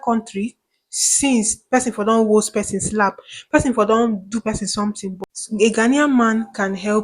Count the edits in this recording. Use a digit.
1